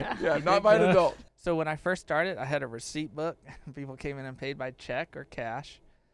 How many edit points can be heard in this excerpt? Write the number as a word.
one